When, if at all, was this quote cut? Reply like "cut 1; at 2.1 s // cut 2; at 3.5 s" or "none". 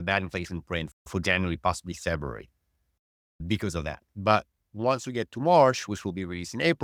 none

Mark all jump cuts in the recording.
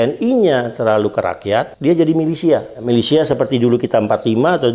cut 1; at 1.7 s // cut 2; at 2.7 s

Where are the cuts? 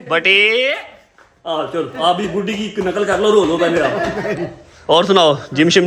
none

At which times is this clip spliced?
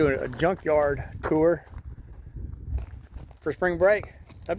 none

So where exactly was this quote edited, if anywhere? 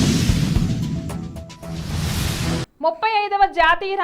none

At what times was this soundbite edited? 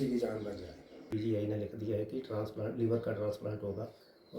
cut 1; at 1.0 s

